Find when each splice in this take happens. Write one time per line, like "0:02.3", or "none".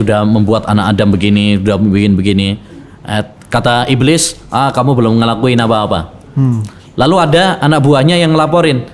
none